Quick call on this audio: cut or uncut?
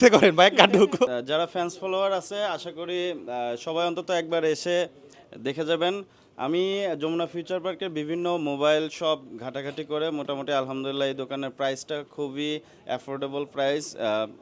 cut